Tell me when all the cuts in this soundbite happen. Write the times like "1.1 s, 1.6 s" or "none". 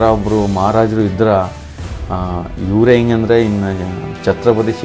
none